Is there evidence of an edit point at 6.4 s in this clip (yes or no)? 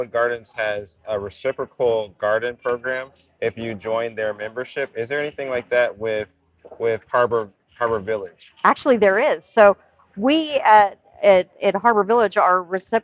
no